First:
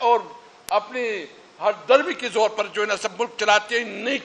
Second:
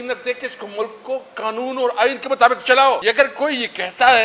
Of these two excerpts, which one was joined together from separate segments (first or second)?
second